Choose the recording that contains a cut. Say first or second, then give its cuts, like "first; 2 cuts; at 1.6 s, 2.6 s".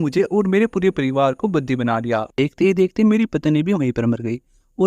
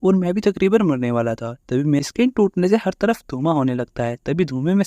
second; 1 cut; at 2.0 s